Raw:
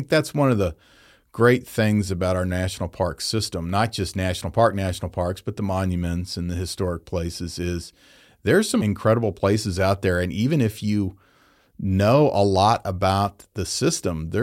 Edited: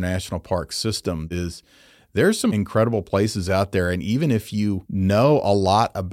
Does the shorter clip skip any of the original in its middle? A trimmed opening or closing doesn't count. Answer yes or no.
yes